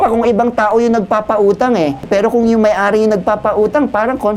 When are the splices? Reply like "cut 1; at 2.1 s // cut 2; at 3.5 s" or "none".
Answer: cut 1; at 2.0 s